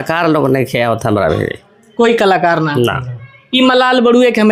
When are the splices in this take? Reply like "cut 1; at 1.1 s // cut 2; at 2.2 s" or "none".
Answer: none